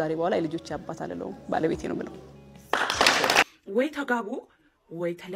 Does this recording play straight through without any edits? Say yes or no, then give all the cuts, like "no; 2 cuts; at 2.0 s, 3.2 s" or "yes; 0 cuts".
no; 1 cut; at 3.4 s